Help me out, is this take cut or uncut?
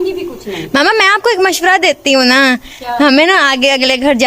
uncut